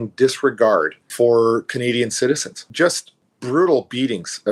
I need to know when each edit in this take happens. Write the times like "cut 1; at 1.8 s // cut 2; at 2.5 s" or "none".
cut 1; at 1.0 s // cut 2; at 2.6 s